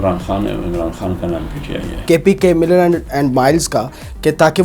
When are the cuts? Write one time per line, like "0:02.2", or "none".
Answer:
0:01.9